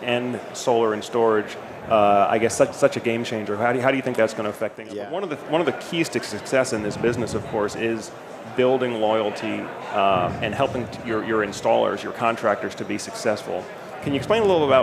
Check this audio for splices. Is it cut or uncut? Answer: cut